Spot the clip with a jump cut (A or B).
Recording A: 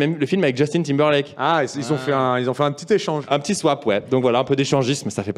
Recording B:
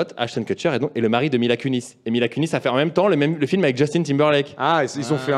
A